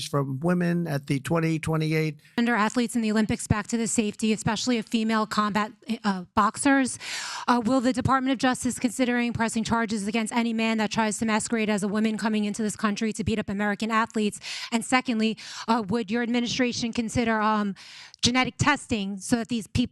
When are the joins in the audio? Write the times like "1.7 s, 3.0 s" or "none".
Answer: 2.2 s